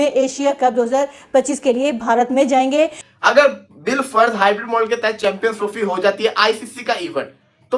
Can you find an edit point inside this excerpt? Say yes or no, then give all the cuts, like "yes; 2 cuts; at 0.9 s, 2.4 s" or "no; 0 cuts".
yes; 1 cut; at 3.1 s